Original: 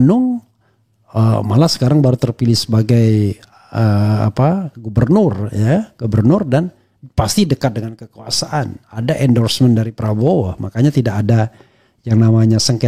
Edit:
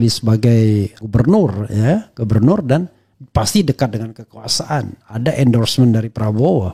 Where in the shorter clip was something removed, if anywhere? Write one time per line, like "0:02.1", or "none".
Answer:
0:01.0